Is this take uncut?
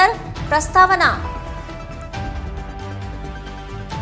yes; 0 cuts

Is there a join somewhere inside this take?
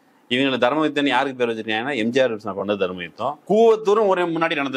yes; 1 cut; at 3.4 s

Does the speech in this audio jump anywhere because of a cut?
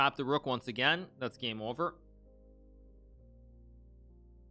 no; 0 cuts

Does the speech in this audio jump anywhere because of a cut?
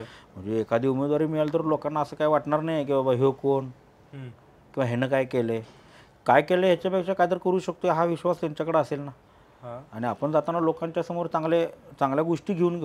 no; 0 cuts

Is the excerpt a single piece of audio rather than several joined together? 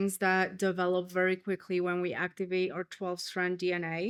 yes; 0 cuts

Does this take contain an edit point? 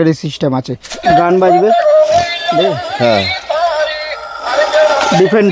yes; 1 cut; at 0.9 s

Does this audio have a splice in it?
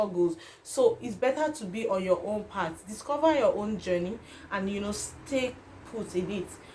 no; 0 cuts

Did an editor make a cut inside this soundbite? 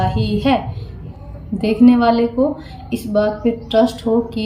yes; 1 cut; at 1.3 s

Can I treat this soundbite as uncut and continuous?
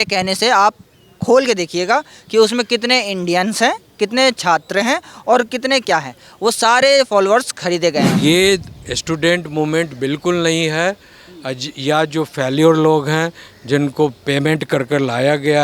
no; 1 cut; at 8.1 s

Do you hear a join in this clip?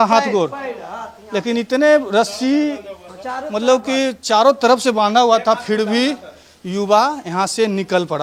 no; 0 cuts

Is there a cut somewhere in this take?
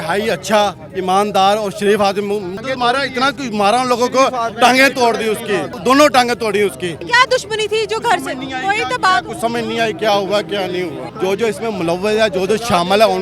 yes; 4 cuts; at 2.5 s, 5.7 s, 7.0 s, 11.0 s

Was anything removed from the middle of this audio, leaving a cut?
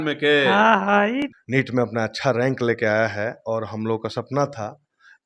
yes; 1 cut; at 1.2 s

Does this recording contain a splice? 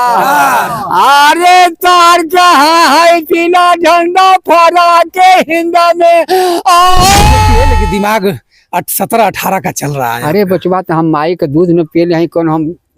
yes; 1 cut; at 7.7 s

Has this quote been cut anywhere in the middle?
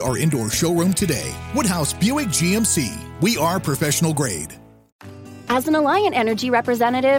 yes; 1 cut; at 5.2 s

